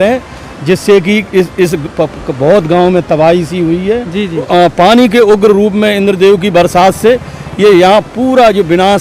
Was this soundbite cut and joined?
yes; 1 cut; at 4.5 s

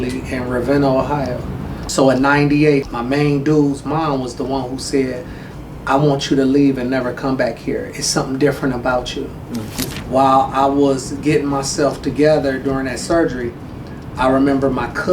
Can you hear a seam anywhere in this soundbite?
yes; 3 cuts; at 1.9 s, 2.9 s, 9.8 s

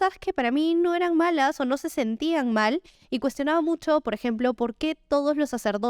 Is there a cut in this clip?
yes; 1 cut; at 2.9 s

